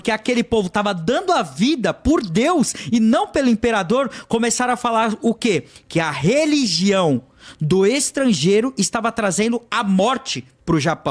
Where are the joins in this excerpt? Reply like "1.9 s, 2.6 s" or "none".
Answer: none